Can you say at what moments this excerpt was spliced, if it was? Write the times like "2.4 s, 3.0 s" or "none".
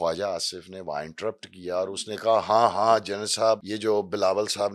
3.7 s